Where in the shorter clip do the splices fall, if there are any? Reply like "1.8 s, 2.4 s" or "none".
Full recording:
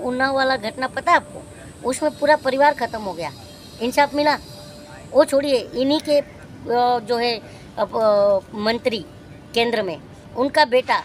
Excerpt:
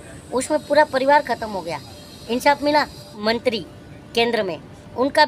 3.1 s